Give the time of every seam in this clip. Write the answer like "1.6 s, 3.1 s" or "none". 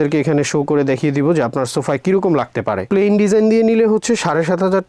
2.9 s